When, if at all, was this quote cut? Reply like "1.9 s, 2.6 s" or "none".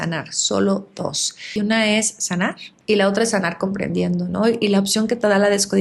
1.5 s, 2.7 s